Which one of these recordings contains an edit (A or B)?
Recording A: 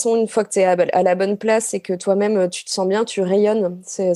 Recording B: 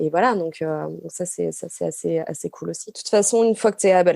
B